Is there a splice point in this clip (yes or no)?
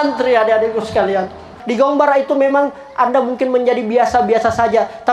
yes